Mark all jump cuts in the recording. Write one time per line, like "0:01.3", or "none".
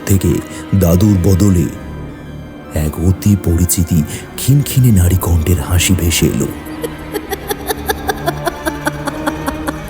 0:06.8